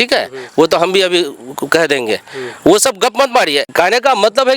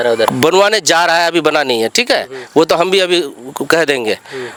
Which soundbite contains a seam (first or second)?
first